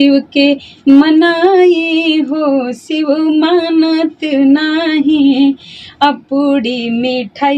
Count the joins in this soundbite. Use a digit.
0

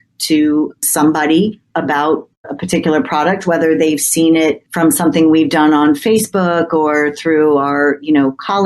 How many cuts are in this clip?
1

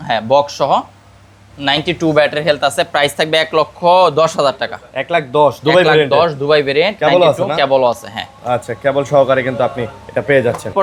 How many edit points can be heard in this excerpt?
0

